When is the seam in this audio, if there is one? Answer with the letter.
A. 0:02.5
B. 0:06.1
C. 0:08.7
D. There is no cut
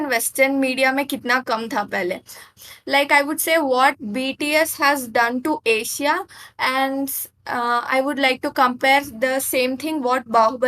A